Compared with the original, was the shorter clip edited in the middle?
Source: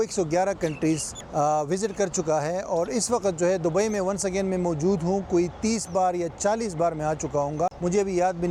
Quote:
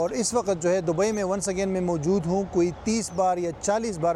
no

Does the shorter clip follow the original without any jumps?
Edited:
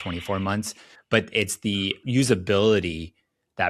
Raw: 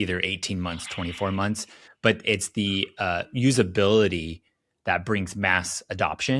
no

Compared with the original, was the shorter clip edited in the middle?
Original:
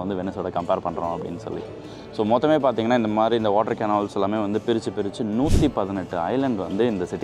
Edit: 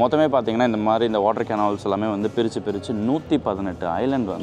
no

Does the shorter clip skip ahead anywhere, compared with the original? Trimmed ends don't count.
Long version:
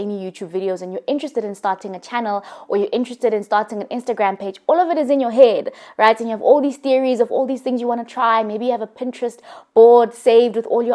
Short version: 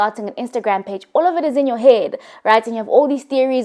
no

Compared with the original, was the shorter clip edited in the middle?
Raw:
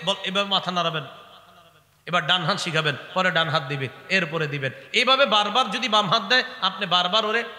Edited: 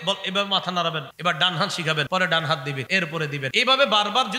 yes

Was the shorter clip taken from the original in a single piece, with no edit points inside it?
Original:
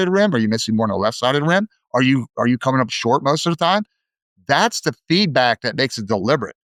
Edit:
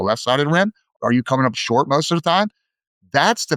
no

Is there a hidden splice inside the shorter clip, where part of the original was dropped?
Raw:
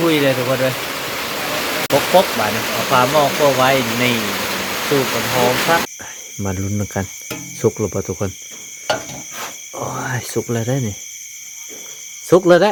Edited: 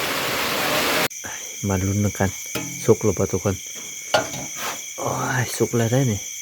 yes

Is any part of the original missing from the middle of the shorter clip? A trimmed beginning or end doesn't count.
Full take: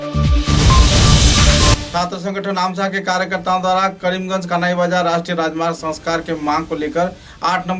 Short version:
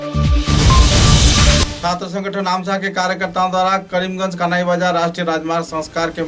yes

